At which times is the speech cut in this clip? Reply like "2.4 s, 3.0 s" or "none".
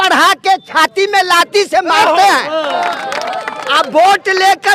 2.7 s